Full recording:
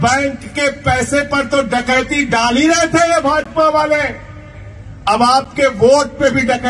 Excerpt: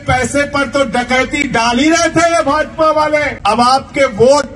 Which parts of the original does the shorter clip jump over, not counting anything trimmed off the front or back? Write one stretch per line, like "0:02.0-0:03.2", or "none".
0:04.1-0:04.9